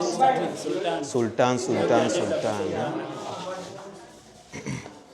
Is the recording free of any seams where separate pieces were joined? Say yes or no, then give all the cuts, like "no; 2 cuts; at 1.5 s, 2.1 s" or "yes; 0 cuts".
no; 1 cut; at 3.8 s